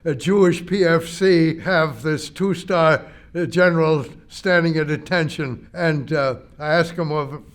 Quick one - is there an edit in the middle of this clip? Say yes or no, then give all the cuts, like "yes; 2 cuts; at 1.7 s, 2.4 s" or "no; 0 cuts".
yes; 2 cuts; at 1.6 s, 5.6 s